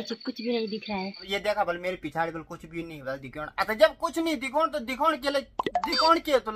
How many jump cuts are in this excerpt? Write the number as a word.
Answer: one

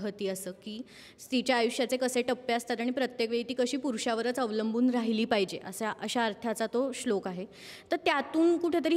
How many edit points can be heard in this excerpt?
zero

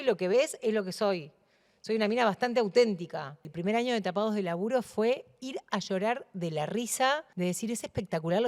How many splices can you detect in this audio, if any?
two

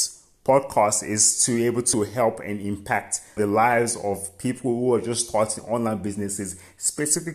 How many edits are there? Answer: two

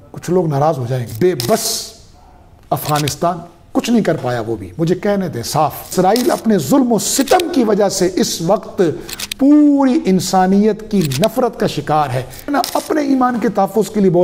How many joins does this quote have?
three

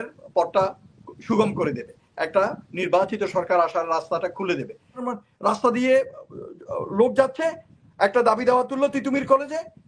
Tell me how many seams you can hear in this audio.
one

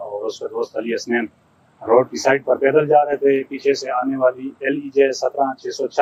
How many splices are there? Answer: zero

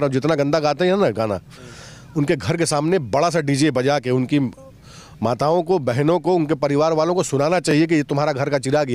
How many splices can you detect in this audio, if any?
zero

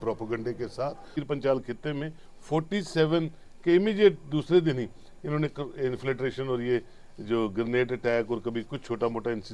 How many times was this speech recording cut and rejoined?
one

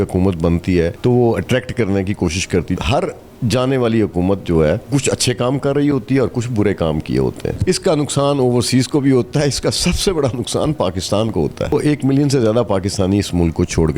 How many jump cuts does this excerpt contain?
five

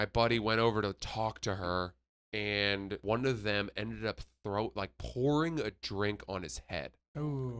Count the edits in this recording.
one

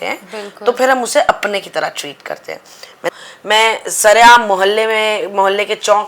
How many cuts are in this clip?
one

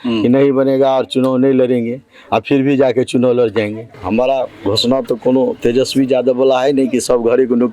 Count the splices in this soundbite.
one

